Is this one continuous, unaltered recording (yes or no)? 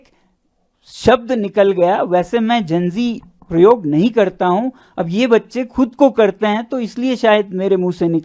yes